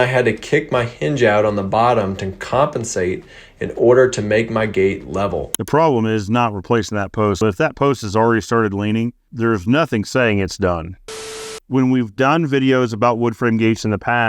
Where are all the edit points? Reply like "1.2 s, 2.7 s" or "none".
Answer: 7.4 s, 11.4 s